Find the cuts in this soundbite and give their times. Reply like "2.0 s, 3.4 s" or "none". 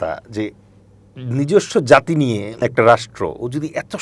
2.6 s